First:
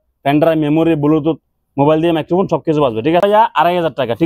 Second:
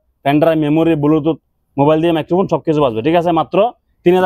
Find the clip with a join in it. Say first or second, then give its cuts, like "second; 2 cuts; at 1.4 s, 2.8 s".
first; 1 cut; at 3.2 s